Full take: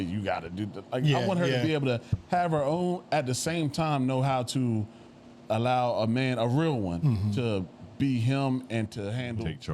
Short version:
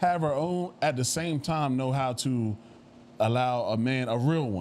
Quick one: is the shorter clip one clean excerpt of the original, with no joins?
yes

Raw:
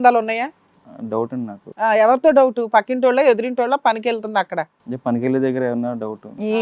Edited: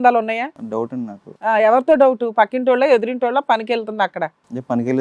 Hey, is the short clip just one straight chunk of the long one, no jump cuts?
no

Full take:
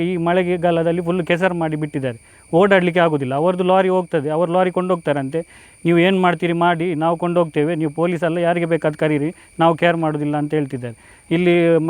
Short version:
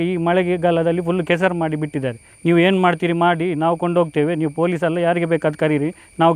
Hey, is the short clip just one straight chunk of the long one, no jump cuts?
no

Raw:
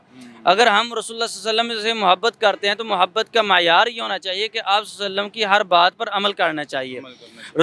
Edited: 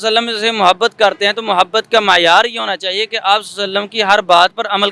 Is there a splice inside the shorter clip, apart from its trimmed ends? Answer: no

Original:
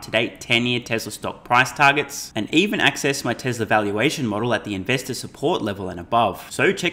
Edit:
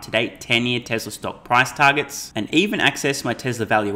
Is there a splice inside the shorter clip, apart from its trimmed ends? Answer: no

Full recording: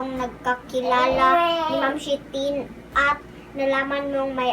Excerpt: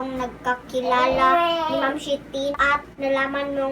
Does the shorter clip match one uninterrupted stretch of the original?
no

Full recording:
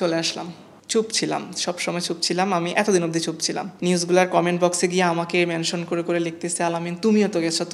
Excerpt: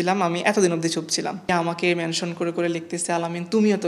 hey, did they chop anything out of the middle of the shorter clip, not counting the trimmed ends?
yes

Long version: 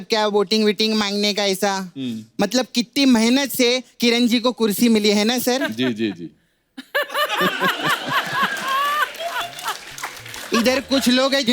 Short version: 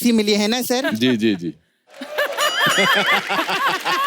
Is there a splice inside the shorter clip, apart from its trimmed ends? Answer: no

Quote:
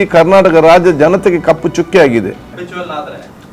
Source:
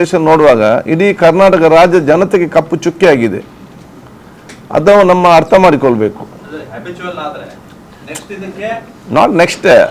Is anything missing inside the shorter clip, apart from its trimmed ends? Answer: yes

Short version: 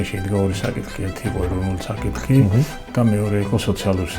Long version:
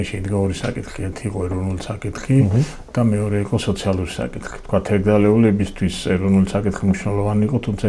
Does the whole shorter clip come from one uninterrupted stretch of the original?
yes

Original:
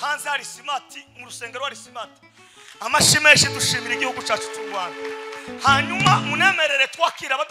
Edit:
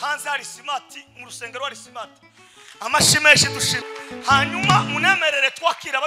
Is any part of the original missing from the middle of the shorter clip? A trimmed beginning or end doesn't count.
yes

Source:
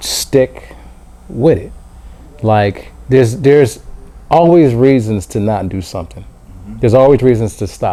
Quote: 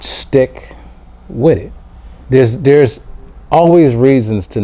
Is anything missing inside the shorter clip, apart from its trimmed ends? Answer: yes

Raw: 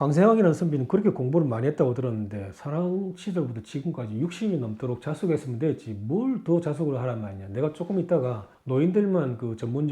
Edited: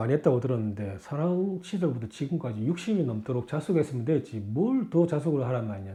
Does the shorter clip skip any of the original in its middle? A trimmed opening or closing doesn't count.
no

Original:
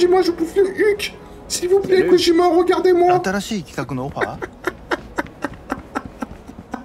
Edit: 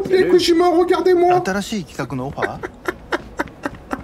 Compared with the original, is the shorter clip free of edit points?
yes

